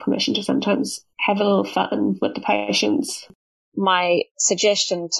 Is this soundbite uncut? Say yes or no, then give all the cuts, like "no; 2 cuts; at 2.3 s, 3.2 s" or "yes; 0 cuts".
no; 3 cuts; at 1.0 s, 3.3 s, 4.4 s